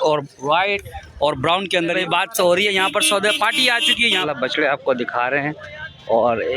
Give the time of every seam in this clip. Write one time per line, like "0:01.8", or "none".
0:02.0
0:04.2

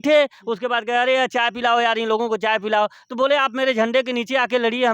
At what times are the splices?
none

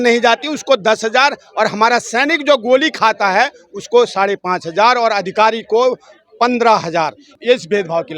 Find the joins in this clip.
0:07.3

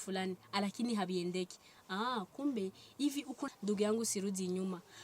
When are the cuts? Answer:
0:03.4

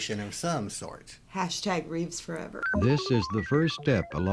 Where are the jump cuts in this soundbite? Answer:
0:02.6

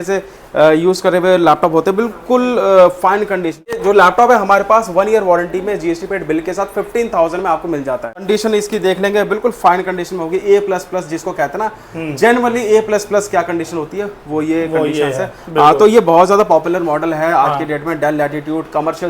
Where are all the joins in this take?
0:03.8
0:08.2

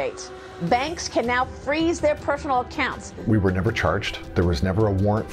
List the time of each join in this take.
0:03.1
0:04.2

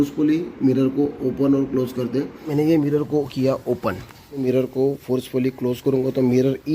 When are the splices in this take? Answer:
0:02.4
0:04.4

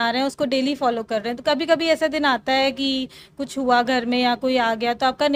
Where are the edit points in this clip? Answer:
none

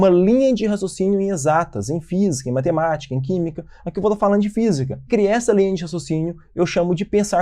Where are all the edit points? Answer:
0:05.1

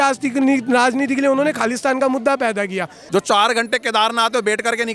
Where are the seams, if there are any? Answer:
0:03.0

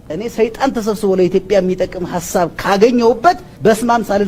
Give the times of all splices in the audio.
none

